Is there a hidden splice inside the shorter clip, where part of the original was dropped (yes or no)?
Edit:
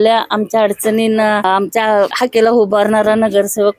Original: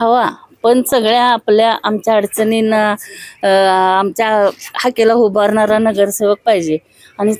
yes